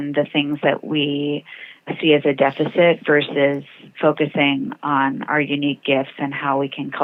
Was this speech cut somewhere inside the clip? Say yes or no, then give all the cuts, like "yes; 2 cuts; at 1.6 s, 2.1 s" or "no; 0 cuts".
no; 0 cuts